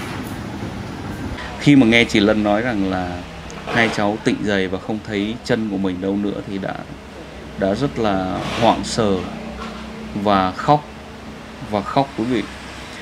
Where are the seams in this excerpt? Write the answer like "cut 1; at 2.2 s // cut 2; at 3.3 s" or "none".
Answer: cut 1; at 1.0 s